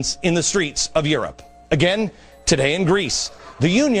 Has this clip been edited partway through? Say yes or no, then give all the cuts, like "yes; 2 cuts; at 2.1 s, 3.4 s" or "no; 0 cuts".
no; 0 cuts